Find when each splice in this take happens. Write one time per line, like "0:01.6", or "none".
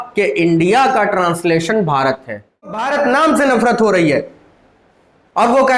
0:02.9